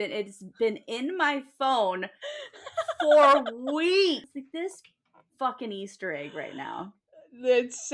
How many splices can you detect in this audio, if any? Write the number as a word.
one